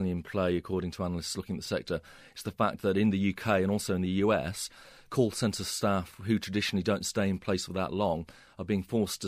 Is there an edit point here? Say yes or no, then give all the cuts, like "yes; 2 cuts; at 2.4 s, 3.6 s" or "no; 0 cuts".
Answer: no; 0 cuts